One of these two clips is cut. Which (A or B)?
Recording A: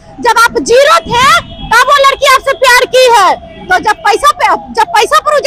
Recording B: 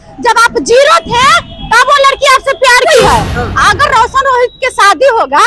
B